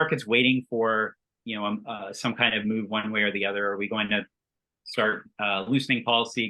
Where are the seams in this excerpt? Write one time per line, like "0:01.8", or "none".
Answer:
none